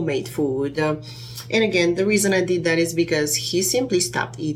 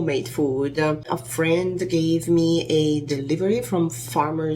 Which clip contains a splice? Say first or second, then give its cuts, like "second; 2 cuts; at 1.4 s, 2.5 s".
second; 1 cut; at 1.2 s